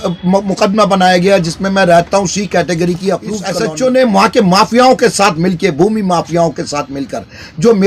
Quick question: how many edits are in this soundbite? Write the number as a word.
one